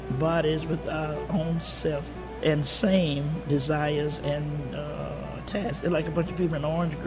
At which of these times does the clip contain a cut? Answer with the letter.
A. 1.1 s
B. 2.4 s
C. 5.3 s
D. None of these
B